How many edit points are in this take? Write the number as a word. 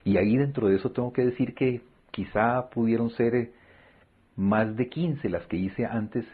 zero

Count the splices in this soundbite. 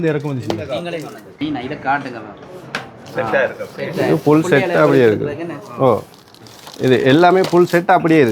one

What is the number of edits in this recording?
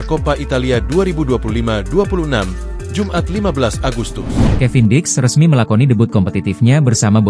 one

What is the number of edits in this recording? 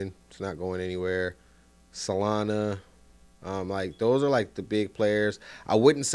zero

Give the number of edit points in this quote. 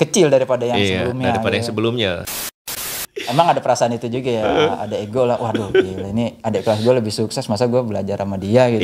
one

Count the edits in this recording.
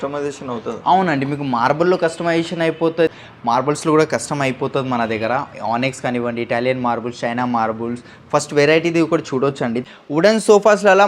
two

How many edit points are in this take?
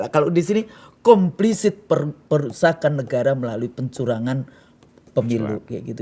zero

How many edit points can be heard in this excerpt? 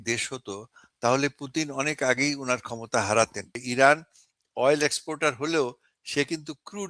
one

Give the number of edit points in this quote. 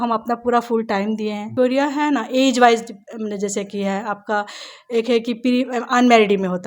one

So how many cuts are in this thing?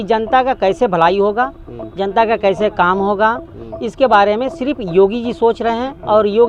zero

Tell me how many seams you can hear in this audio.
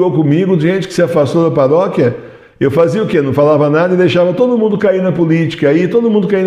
zero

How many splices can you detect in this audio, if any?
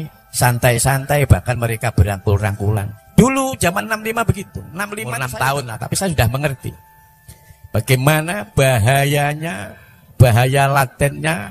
two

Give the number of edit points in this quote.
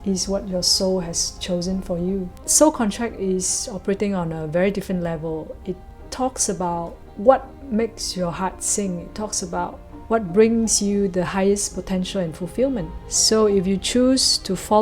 two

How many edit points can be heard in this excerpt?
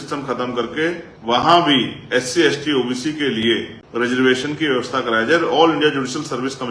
two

